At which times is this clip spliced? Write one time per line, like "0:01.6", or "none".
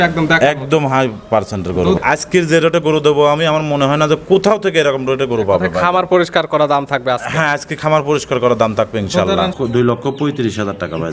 0:02.0
0:09.5